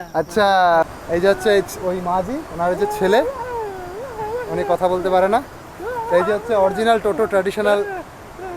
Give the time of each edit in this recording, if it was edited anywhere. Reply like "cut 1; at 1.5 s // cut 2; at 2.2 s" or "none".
cut 1; at 0.9 s